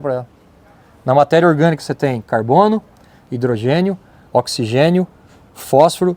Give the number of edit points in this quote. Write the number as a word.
zero